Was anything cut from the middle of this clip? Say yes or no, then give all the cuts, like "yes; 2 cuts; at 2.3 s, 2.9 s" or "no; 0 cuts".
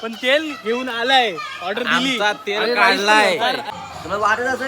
yes; 1 cut; at 3.6 s